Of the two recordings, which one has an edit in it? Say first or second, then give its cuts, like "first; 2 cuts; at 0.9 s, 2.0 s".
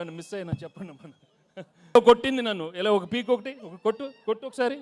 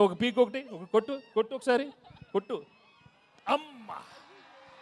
first; 1 cut; at 2.0 s